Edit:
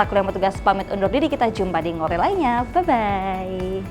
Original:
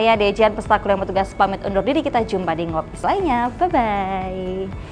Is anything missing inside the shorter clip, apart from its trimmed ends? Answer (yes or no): yes